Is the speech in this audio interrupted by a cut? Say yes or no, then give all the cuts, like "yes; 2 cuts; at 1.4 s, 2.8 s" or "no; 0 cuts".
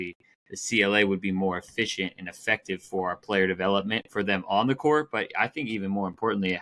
no; 0 cuts